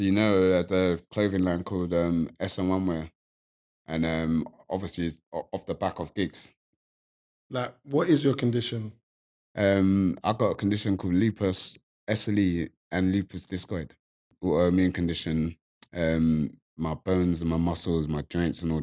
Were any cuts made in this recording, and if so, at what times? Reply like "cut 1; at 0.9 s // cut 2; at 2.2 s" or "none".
cut 1; at 7.0 s // cut 2; at 14.3 s